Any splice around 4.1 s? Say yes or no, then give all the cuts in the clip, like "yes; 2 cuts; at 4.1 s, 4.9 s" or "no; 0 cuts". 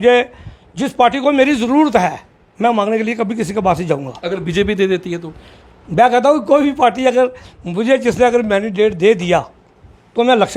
no; 0 cuts